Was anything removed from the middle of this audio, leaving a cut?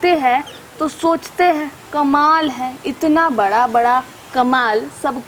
no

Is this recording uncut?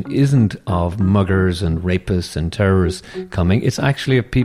yes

